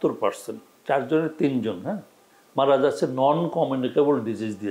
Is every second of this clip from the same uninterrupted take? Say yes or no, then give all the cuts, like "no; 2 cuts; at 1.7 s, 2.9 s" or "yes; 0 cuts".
yes; 0 cuts